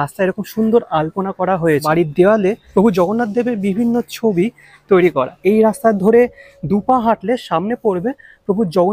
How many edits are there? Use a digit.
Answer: 3